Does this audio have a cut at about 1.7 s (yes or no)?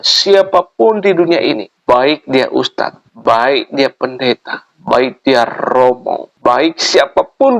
yes